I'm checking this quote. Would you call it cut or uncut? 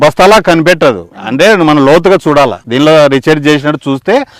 uncut